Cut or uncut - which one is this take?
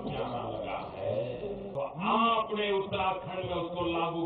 cut